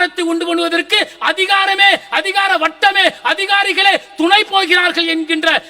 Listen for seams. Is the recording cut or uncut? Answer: uncut